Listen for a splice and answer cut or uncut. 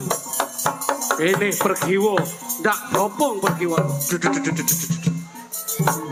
uncut